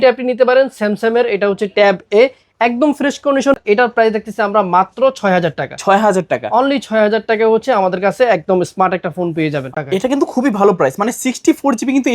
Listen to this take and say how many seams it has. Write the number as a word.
two